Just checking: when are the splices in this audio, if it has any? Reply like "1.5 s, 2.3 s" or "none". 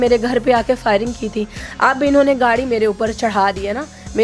none